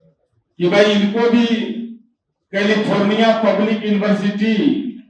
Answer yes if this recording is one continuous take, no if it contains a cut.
yes